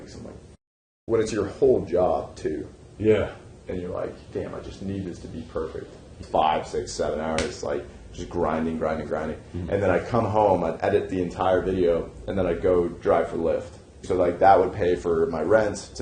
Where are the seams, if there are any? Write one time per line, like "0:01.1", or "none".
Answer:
0:00.9
0:06.2
0:14.0